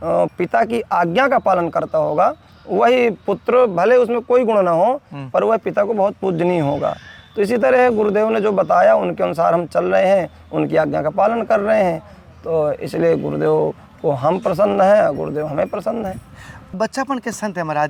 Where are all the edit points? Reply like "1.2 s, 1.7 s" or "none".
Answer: none